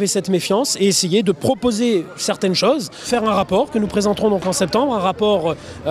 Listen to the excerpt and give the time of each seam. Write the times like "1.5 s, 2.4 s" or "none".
1.4 s